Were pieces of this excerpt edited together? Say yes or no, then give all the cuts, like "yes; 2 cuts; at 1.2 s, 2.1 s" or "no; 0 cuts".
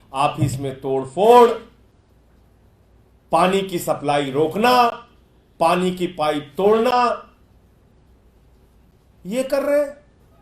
no; 0 cuts